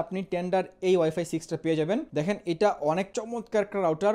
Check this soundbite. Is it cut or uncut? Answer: cut